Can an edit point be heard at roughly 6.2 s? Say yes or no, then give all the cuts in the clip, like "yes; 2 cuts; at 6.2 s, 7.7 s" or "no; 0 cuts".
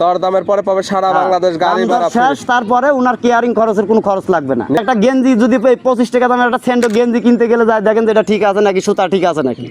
no; 1 cut; at 4.8 s